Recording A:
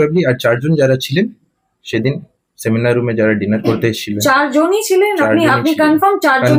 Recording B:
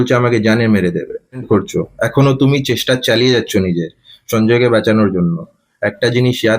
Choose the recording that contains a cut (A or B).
B